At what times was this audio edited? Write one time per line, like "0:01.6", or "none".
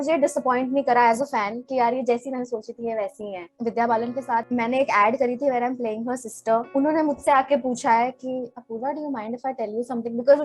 0:03.5
0:04.5
0:06.7